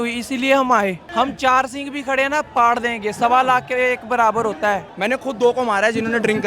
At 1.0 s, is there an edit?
yes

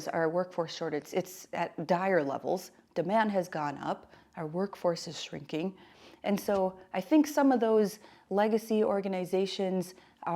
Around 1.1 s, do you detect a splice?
yes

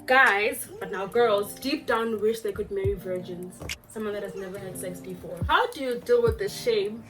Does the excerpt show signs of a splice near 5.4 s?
yes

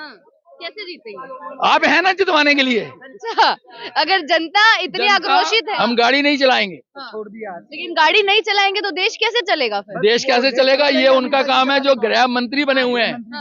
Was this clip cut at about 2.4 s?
no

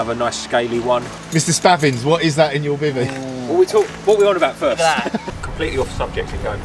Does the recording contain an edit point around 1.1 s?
yes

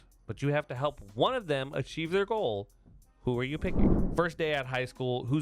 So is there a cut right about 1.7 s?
no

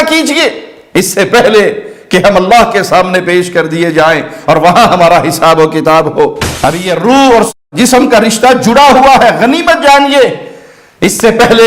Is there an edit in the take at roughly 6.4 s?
yes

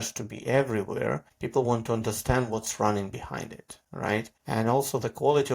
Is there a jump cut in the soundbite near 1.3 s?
yes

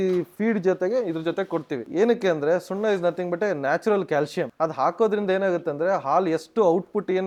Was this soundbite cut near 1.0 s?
no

